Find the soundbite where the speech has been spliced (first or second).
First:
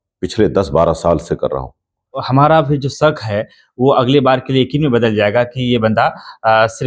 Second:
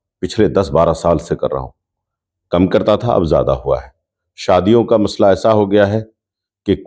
first